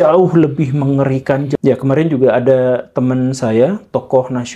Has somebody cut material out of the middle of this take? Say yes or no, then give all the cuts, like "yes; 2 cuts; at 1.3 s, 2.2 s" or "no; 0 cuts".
yes; 1 cut; at 1.5 s